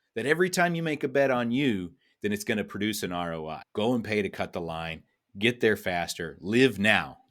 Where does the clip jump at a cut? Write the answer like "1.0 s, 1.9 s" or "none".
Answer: 3.6 s

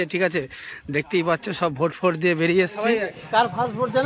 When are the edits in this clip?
3.1 s

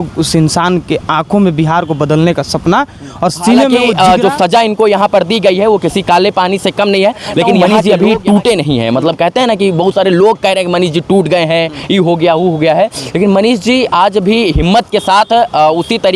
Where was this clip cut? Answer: 3.7 s, 7.6 s

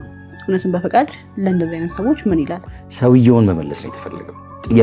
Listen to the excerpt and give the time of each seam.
2.7 s

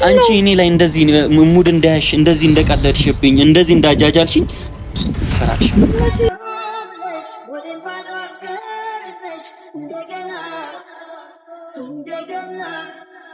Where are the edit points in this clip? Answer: none

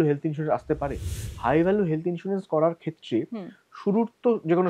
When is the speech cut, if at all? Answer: 1.1 s

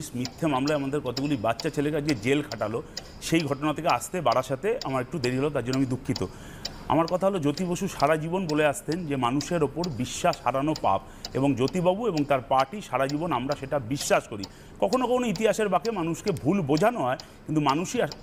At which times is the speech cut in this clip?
none

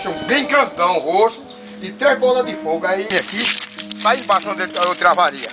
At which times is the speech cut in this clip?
3.1 s

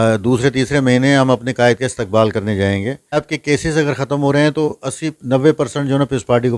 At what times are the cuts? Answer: 3.3 s

